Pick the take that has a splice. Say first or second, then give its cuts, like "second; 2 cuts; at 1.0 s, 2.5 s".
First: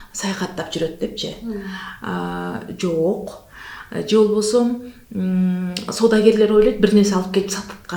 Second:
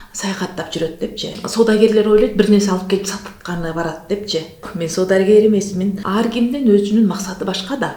second; 3 cuts; at 1.4 s, 4.7 s, 6.0 s